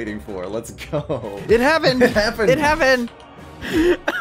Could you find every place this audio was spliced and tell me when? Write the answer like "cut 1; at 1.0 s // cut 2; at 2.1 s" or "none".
cut 1; at 3.1 s